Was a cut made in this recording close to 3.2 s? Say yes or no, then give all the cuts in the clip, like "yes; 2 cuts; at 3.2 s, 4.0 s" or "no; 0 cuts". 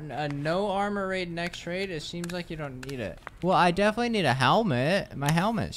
yes; 1 cut; at 3.2 s